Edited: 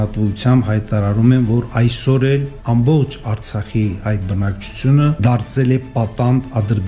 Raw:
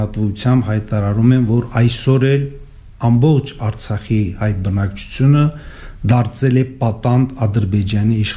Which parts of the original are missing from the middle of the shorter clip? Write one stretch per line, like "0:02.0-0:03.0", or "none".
0:02.5-0:02.9
0:05.5-0:06.0